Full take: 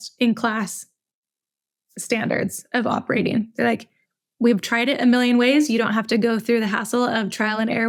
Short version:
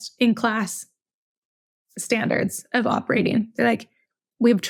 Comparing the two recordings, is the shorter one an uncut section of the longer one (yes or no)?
yes